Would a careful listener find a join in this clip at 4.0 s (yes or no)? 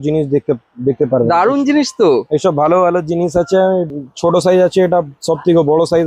yes